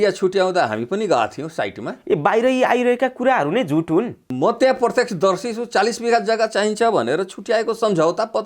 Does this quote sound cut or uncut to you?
cut